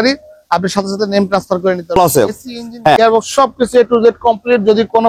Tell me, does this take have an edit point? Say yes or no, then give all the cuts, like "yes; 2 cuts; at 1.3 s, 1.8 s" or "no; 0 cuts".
yes; 1 cut; at 2.0 s